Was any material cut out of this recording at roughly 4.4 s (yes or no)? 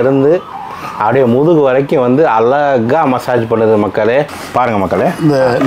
yes